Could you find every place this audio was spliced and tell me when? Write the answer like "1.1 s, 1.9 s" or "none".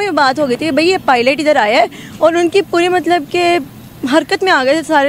none